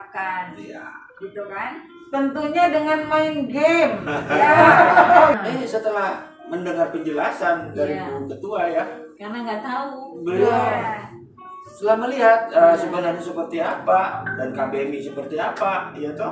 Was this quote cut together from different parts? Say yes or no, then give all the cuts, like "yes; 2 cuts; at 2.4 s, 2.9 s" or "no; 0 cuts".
yes; 1 cut; at 5.3 s